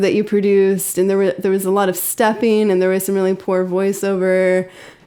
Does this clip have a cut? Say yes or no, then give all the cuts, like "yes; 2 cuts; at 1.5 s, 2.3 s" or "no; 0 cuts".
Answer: no; 0 cuts